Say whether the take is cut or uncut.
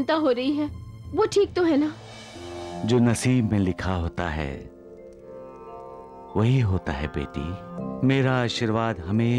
cut